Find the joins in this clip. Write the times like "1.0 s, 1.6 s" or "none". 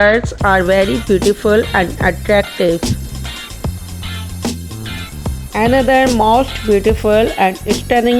2.8 s, 4.9 s